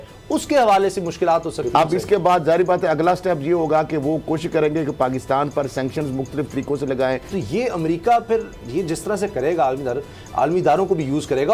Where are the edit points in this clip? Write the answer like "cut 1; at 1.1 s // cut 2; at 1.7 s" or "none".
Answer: cut 1; at 2.0 s // cut 2; at 7.2 s